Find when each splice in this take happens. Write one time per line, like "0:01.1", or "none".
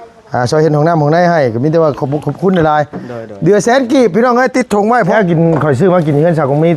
0:05.1